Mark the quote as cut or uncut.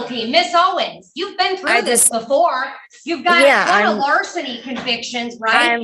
uncut